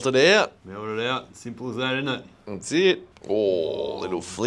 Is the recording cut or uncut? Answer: cut